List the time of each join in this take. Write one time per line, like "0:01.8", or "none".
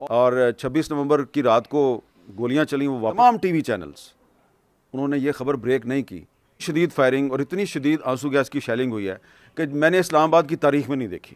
0:03.1
0:06.6